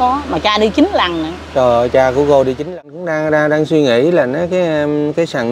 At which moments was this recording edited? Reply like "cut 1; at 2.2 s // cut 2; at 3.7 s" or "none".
cut 1; at 2.7 s